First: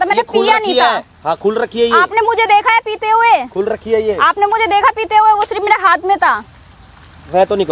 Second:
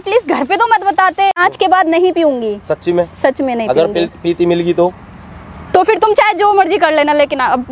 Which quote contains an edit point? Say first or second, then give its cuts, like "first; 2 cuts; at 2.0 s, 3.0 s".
second; 1 cut; at 1.4 s